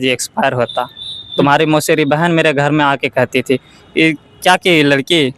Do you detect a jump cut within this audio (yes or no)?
no